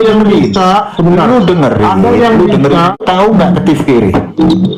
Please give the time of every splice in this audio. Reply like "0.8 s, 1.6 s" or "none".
3.0 s